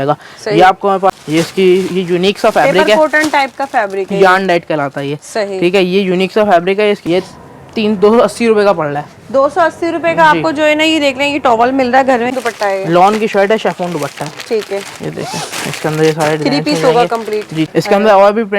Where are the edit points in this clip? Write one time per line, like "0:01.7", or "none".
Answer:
0:01.2
0:07.0
0:12.3
0:17.7